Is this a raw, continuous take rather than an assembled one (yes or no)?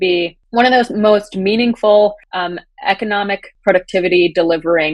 yes